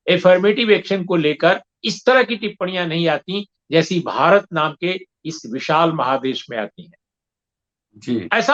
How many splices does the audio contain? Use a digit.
0